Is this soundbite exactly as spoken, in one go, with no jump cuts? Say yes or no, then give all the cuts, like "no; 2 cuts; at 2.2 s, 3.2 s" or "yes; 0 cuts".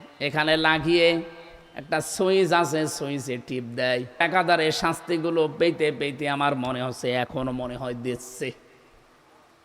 no; 1 cut; at 4.2 s